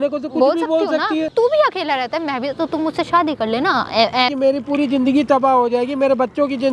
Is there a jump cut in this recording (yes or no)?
yes